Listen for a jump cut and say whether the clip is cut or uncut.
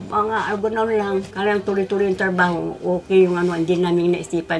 cut